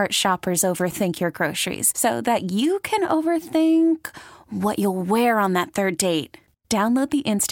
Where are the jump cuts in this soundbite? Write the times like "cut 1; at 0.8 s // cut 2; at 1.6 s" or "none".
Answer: none